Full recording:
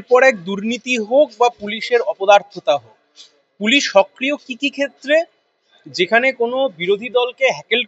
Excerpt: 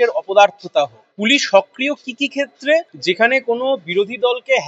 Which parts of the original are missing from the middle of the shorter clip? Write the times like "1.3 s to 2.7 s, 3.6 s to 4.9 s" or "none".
3.0 s to 3.5 s, 5.3 s to 5.8 s